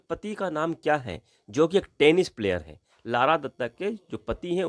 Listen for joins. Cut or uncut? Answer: uncut